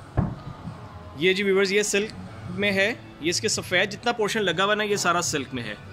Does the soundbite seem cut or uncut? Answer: uncut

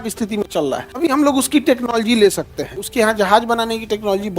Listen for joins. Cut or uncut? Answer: cut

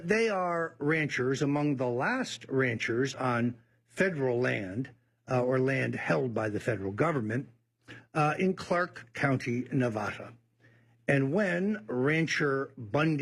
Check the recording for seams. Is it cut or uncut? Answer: uncut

